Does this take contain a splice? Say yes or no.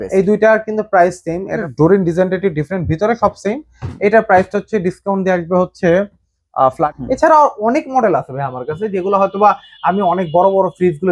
yes